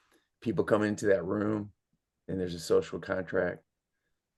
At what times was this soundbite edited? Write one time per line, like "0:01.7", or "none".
none